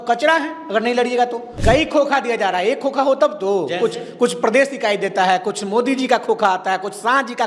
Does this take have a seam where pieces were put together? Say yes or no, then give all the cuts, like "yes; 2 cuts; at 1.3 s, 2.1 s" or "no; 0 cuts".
yes; 1 cut; at 1.5 s